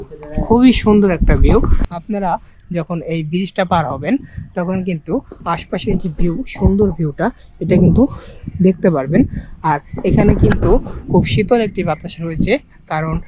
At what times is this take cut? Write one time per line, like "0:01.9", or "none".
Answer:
0:01.8